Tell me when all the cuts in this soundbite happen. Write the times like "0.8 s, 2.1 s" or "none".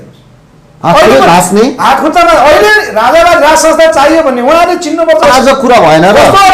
5.2 s